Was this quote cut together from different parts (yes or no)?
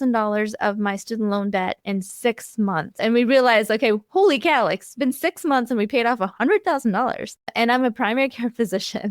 yes